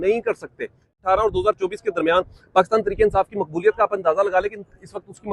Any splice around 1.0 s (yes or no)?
yes